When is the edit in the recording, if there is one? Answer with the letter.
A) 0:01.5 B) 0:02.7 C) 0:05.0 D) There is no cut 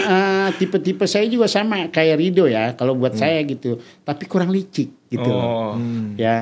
D